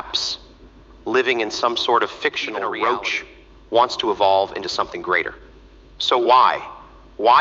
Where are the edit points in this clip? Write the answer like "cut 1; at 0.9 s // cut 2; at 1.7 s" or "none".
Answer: cut 1; at 2.5 s